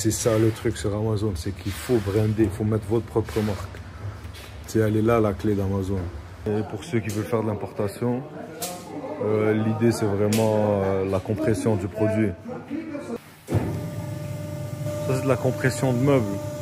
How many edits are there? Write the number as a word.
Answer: two